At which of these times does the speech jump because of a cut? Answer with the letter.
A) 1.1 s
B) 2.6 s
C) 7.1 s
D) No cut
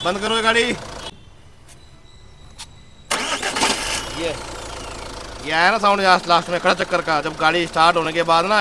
A